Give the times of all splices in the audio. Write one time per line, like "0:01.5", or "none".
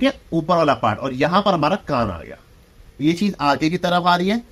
0:02.8